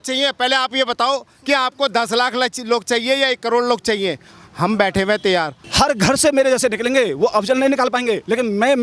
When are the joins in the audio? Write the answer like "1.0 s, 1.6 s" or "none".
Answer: 5.6 s